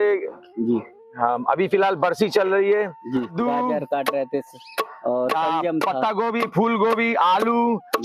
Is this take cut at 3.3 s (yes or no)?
yes